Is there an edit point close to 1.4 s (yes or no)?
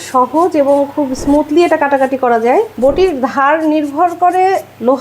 no